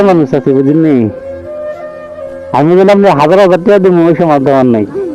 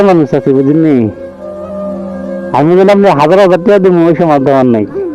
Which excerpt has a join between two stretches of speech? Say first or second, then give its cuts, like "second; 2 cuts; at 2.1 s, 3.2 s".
second; 2 cuts; at 1.2 s, 2.5 s